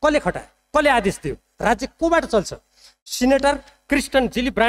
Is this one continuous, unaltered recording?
yes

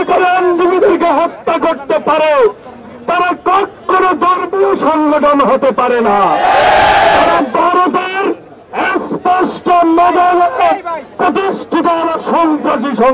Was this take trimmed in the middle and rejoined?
no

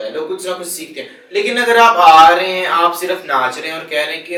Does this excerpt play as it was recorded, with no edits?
yes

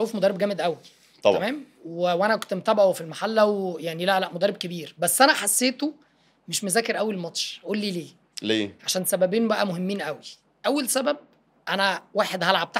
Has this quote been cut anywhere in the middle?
no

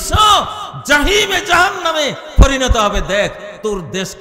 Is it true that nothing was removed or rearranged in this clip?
yes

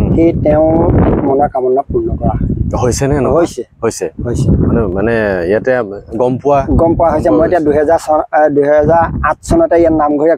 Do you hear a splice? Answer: no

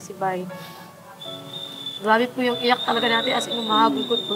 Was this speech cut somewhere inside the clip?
no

